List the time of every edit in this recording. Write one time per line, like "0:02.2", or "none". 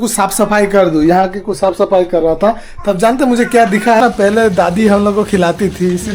0:04.0